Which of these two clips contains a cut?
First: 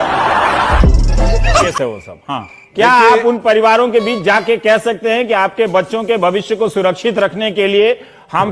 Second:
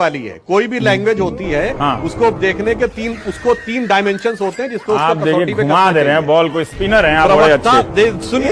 first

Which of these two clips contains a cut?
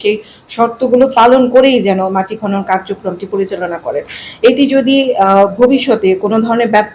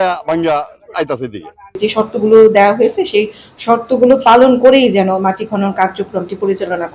second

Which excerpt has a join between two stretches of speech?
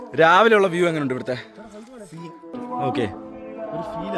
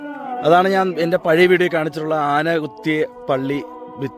first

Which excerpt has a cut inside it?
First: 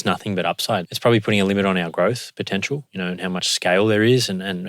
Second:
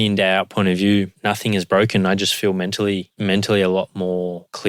first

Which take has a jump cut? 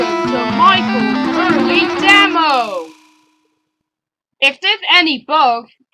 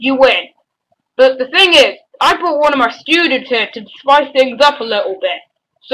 first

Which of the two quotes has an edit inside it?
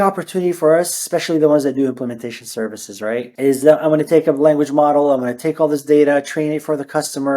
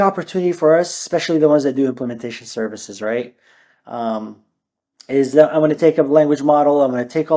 first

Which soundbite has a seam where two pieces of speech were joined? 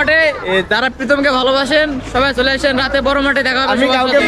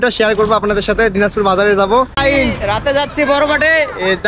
second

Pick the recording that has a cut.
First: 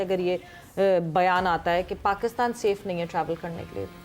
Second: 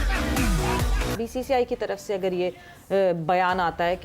second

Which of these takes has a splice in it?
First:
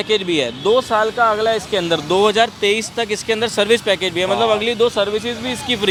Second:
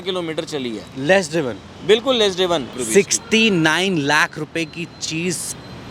second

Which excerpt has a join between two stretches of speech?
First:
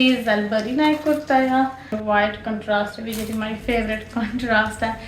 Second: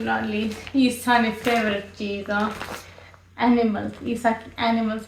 first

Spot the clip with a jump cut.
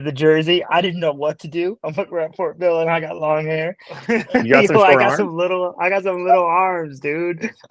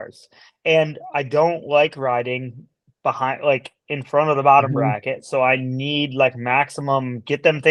first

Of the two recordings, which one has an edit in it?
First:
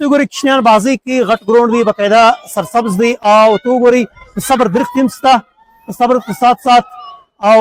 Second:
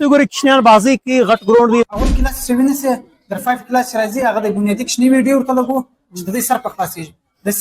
second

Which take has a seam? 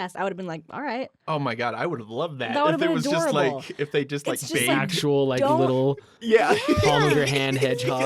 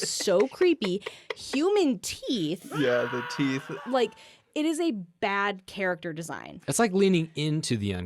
second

